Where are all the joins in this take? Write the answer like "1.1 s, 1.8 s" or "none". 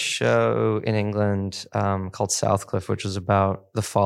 none